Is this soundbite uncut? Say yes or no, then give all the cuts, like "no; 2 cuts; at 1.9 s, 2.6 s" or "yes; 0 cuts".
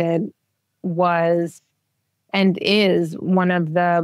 yes; 0 cuts